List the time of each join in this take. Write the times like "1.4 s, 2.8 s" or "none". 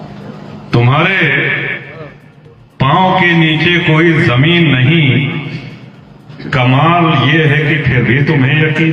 none